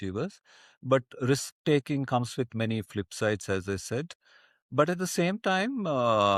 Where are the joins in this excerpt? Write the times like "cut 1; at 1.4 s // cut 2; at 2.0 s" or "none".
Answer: none